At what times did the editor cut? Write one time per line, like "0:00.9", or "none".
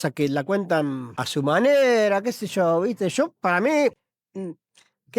0:01.1